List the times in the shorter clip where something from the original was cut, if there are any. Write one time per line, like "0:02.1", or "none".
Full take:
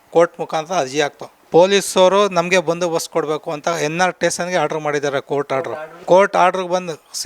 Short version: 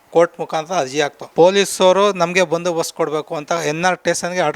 0:01.2